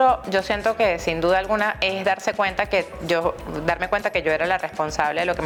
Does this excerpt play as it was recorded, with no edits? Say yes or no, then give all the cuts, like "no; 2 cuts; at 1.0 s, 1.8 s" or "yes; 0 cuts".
yes; 0 cuts